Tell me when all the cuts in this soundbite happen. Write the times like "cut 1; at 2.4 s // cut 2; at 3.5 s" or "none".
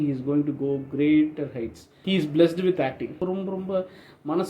cut 1; at 2.0 s // cut 2; at 3.2 s